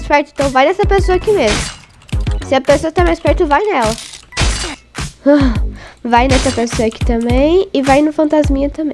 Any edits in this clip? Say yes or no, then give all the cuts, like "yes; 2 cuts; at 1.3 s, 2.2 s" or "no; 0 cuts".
no; 0 cuts